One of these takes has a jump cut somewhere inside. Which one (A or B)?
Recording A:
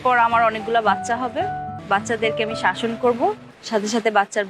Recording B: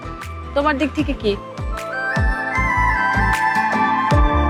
A